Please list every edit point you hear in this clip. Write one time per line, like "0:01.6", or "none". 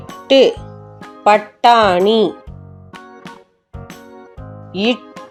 none